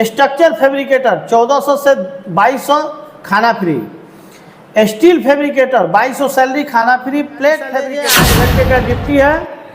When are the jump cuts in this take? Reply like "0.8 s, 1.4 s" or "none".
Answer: 8.0 s